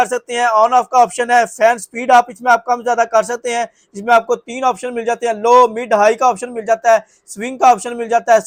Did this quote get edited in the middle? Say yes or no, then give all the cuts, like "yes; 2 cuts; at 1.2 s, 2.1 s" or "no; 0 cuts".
no; 0 cuts